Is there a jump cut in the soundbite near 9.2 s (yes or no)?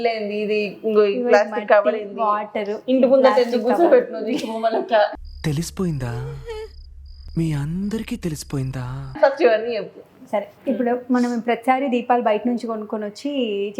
no